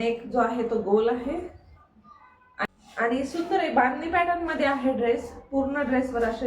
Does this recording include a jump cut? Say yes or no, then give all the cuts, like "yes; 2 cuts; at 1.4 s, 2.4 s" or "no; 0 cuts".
yes; 1 cut; at 2.7 s